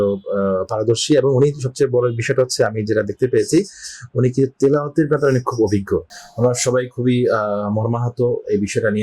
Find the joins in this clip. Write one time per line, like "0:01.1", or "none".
0:06.2